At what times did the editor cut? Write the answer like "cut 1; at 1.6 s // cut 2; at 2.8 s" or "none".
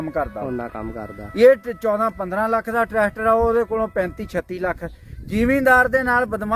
none